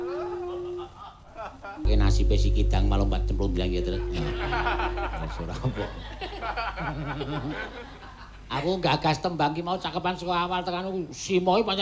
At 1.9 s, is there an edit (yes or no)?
yes